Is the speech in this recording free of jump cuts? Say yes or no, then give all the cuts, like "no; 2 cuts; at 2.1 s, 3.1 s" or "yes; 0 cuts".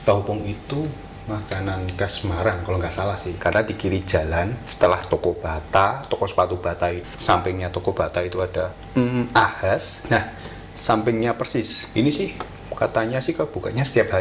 no; 5 cuts; at 3.3 s, 4.6 s, 7.0 s, 8.8 s, 11.8 s